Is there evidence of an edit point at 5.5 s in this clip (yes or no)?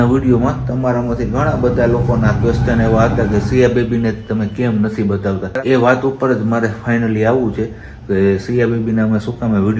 yes